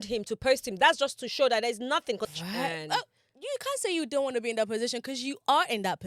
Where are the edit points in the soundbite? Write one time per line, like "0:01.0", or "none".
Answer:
0:02.2